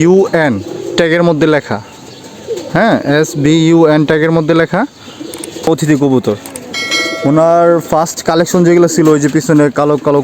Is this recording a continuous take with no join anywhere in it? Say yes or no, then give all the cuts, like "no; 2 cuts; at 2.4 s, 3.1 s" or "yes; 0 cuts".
no; 1 cut; at 5.7 s